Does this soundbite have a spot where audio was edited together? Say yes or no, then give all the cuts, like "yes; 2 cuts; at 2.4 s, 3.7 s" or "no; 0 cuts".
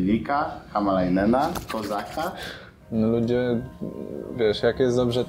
yes; 1 cut; at 2.8 s